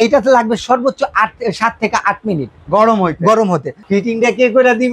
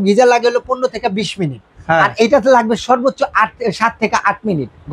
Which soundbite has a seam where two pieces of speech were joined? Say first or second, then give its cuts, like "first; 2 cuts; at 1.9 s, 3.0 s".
first; 1 cut; at 3.7 s